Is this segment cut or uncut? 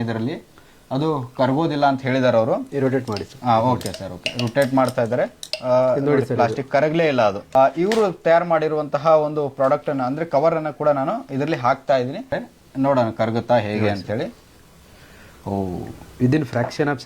cut